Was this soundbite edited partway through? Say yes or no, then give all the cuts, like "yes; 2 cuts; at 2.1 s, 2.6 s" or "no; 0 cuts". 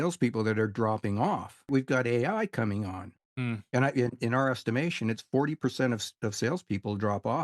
yes; 2 cuts; at 1.7 s, 3.1 s